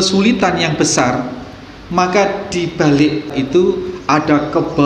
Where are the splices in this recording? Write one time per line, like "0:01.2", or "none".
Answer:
0:03.3